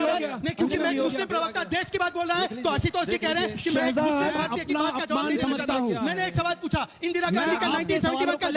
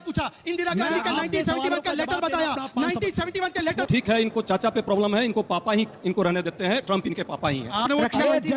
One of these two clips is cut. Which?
second; 2 cuts; at 3.9 s, 7.8 s

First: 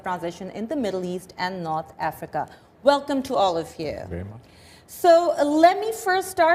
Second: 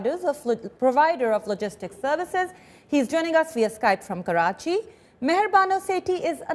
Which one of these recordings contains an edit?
second; 1 cut; at 2.3 s

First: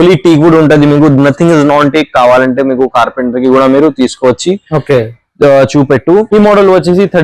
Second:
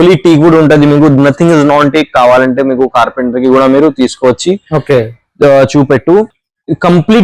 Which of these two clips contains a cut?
first; 1 cut; at 6.3 s

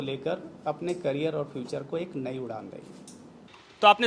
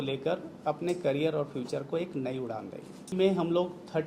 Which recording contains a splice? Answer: second; 1 cut; at 3.1 s

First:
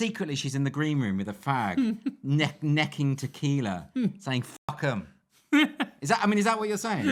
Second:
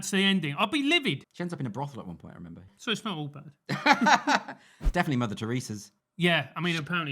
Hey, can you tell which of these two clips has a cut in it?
second; 3 cuts; at 1.3 s, 2.7 s, 4.7 s

